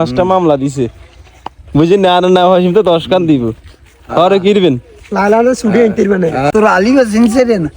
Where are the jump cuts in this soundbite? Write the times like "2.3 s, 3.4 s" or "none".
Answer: 6.5 s